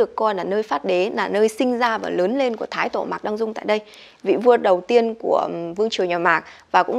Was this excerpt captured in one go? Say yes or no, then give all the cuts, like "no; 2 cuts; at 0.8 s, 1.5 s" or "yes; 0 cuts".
yes; 0 cuts